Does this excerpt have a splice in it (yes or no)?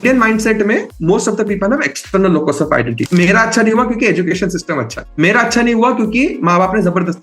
yes